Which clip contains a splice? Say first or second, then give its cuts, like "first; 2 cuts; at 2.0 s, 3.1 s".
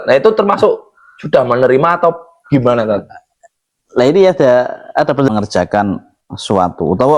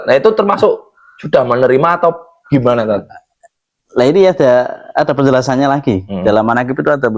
first; 1 cut; at 5.3 s